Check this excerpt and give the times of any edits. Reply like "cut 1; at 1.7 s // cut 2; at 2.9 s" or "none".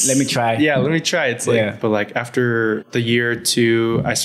cut 1; at 1.8 s // cut 2; at 2.9 s